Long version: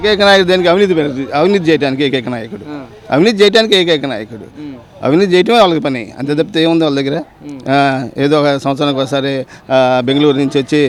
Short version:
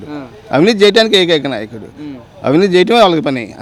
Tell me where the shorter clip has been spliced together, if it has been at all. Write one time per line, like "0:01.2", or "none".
none